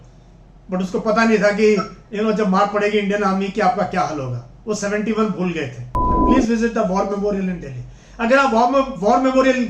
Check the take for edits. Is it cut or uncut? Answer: cut